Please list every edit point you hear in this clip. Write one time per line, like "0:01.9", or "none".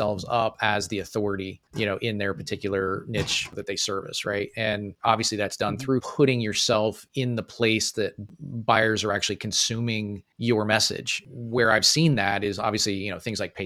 0:06.1
0:11.2